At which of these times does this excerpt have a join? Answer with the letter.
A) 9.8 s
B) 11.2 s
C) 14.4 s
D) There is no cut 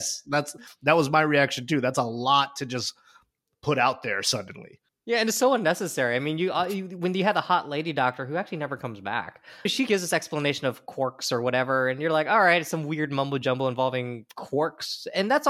A